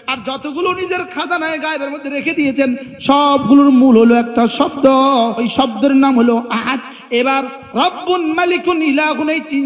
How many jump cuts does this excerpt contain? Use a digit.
2